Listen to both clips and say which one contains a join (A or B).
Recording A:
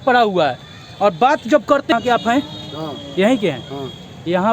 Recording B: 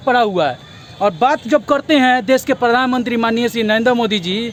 A